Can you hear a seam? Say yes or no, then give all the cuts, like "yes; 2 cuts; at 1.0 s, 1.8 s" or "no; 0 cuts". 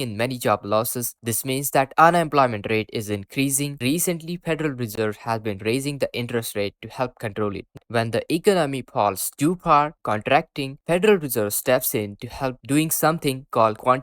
yes; 2 cuts; at 3.7 s, 7.8 s